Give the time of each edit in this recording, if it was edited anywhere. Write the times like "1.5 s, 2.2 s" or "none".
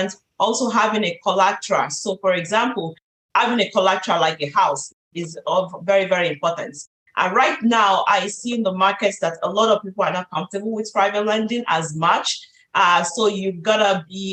none